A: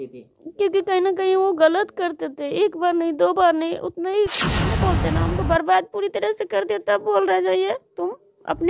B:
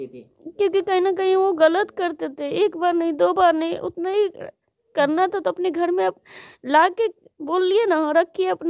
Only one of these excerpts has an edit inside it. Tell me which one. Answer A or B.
A